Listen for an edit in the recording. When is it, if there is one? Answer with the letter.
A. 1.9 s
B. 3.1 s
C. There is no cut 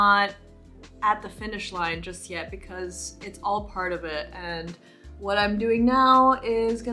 C